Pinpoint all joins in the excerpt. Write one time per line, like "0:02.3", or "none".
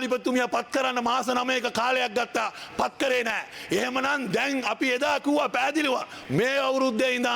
0:06.1